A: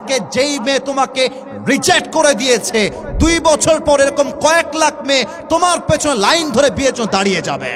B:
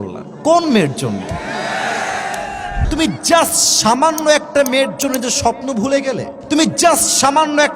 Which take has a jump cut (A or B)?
B